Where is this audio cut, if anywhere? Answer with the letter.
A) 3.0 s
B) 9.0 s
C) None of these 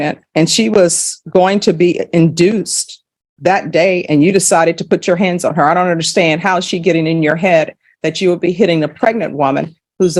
C